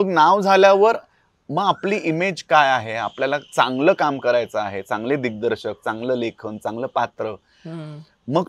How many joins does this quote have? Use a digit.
0